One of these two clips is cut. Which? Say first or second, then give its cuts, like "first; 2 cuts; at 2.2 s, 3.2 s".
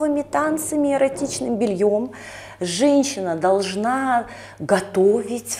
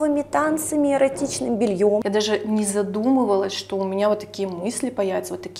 second; 1 cut; at 2.0 s